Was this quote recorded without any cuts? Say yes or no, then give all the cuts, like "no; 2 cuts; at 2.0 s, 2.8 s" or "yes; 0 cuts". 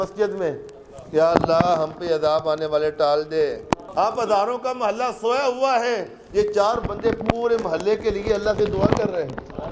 no; 1 cut; at 3.9 s